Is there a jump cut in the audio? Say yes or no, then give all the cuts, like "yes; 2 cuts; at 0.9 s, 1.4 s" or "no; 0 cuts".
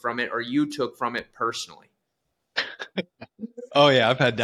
no; 0 cuts